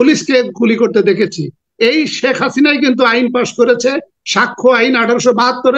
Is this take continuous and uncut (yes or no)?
yes